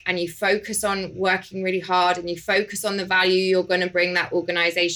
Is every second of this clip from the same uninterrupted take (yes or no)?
yes